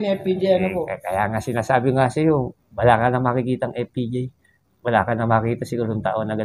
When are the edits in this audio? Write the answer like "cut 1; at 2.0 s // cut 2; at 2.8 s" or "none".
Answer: none